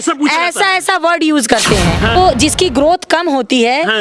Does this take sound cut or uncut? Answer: cut